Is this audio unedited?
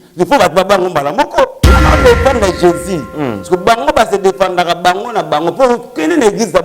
no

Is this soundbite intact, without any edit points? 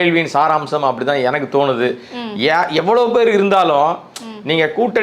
yes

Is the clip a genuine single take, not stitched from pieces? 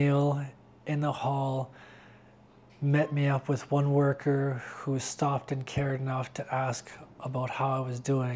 yes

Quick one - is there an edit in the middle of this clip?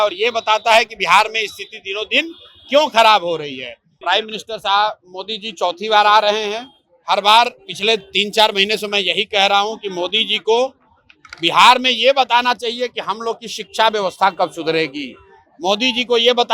yes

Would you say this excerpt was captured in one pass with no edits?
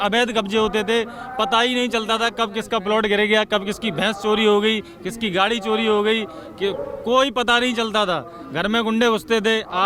yes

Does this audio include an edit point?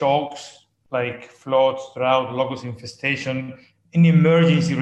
yes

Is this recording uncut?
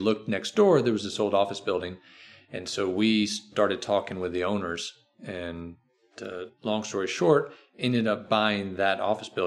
yes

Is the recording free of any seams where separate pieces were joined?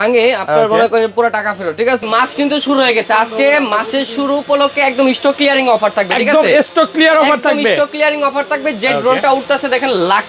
no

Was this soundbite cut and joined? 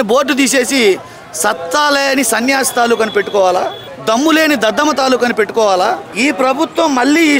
yes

